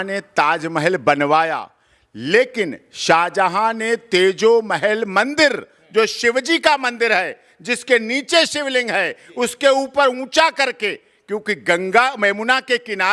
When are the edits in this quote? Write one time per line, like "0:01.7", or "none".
none